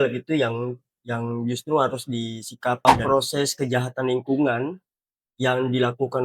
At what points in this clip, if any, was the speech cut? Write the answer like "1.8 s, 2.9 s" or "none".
3.0 s